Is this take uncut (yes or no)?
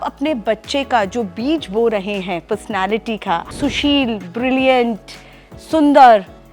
no